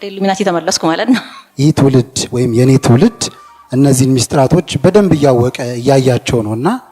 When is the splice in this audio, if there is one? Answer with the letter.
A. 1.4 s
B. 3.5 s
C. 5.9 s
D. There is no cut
A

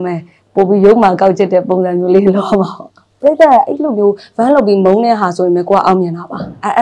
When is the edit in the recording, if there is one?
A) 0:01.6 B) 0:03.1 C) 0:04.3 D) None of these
B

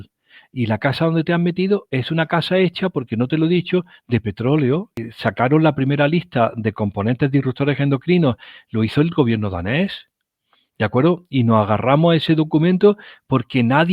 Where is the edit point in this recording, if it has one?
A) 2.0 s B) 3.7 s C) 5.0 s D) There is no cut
C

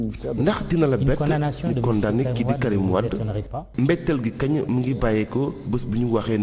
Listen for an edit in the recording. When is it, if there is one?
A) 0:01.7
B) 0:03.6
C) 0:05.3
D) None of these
D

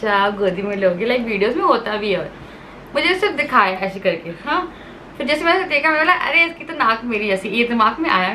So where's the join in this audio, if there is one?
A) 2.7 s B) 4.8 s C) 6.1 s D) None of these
D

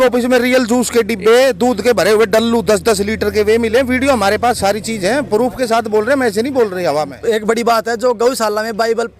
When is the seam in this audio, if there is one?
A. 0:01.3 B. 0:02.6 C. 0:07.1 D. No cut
C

